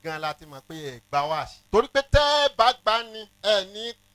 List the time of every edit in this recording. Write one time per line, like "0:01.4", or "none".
0:01.6
0:03.2